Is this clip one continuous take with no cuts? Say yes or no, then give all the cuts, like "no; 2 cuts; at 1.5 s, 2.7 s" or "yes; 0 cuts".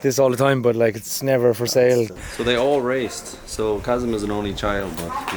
no; 1 cut; at 2.1 s